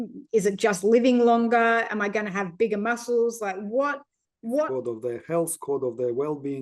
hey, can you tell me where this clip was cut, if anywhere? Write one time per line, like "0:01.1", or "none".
0:04.7